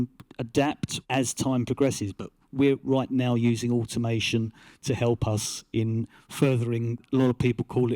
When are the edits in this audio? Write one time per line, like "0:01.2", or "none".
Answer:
0:00.9
0:02.8
0:07.0